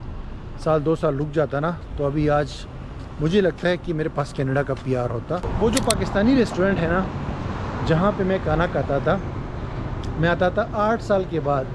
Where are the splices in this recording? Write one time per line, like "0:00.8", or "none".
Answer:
0:05.5